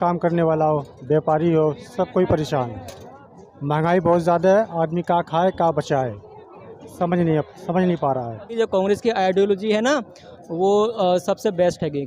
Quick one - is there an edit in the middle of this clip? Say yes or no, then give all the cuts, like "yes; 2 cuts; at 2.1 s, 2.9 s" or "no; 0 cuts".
yes; 1 cut; at 8.6 s